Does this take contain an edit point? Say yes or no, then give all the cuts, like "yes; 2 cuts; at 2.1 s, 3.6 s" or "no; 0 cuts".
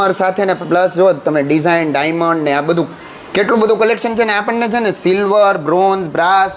no; 0 cuts